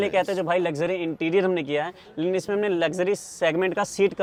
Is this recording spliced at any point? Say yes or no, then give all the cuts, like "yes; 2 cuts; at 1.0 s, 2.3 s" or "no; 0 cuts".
no; 0 cuts